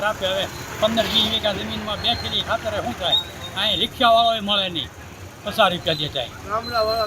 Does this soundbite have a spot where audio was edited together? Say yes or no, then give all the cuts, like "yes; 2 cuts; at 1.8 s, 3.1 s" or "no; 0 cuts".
no; 0 cuts